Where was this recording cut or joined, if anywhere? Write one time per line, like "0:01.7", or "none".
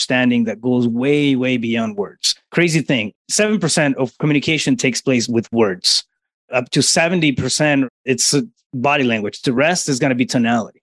none